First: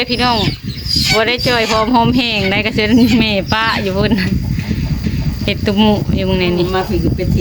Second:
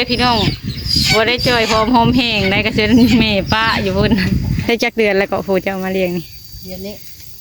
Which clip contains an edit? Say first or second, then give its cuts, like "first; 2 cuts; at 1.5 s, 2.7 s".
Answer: second; 1 cut; at 4.6 s